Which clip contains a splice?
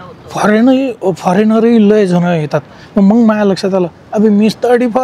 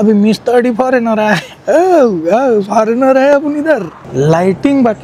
second; 1 cut; at 4.0 s

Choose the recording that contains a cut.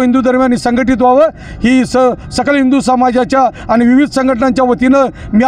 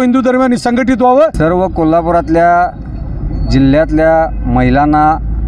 second; 1 cut; at 1.3 s

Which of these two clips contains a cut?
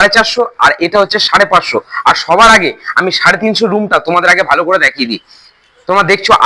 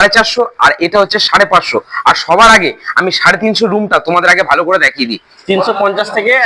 second; 1 cut; at 5.3 s

